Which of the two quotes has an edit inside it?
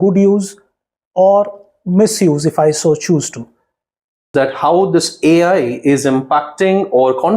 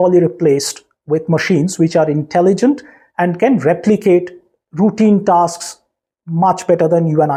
first; 1 cut; at 4.3 s

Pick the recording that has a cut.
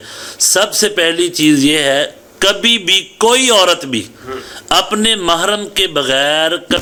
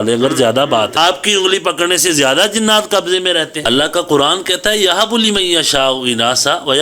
second; 2 cuts; at 1.0 s, 3.6 s

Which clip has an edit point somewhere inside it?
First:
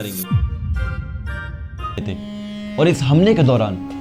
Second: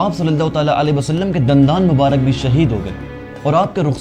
first; 1 cut; at 2.1 s

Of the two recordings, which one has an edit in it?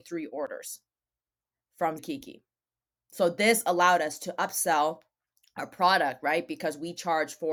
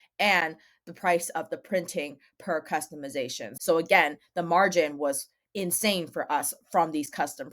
second; 1 cut; at 3.4 s

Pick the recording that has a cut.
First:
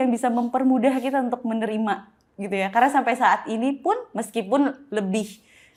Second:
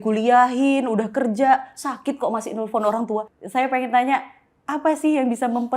second; 1 cut; at 3.4 s

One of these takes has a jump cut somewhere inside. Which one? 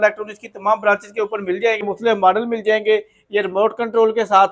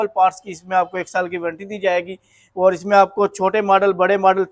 first; 1 cut; at 1.8 s

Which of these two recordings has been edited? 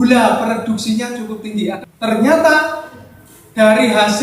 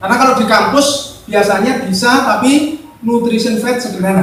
first; 1 cut; at 1.8 s

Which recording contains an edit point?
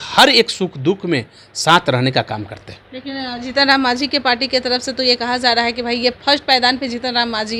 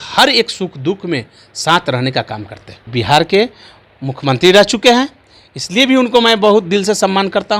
second; 1 cut; at 2.9 s

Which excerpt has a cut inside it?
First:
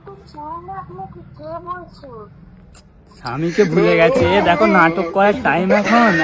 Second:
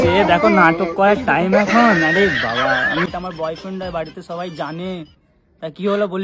second; 1 cut; at 3.1 s

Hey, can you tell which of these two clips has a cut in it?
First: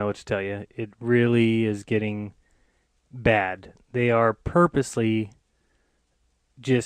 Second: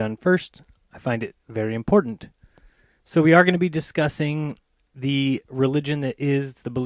first; 1 cut; at 4.8 s

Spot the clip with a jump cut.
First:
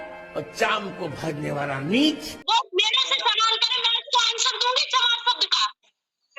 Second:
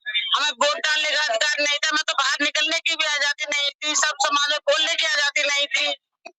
first; 1 cut; at 2.3 s

